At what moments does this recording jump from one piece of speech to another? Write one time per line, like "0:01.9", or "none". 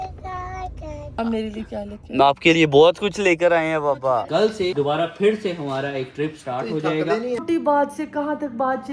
0:04.2
0:07.4